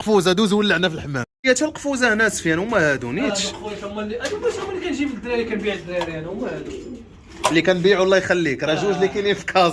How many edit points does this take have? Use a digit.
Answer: 0